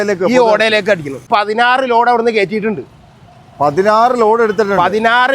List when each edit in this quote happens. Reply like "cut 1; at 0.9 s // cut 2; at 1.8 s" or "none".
cut 1; at 1.2 s